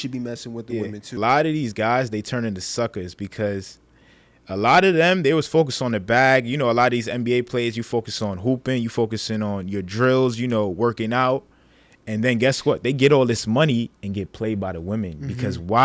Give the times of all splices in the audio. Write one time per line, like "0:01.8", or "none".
0:01.2